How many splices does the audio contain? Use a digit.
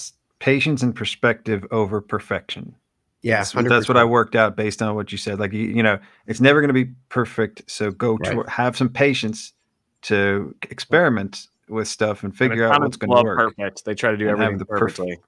0